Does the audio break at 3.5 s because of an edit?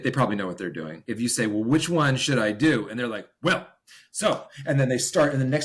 no; 1 cut; at 1.1 s

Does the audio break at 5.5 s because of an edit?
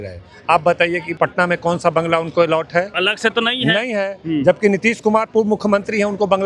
no; 2 cuts; at 1.1 s, 2.9 s

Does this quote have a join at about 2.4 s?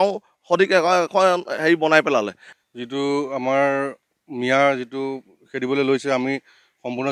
yes; 1 cut; at 2.4 s

